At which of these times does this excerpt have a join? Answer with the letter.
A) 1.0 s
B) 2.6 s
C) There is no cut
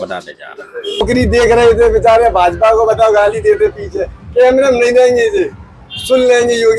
A